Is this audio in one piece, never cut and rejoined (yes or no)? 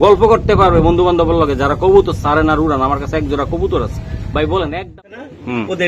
no